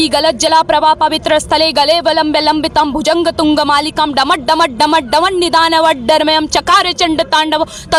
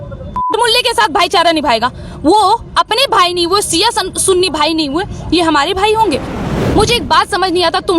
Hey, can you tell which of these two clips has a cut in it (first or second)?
second